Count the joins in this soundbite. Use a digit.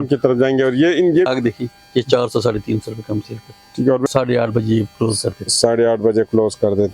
2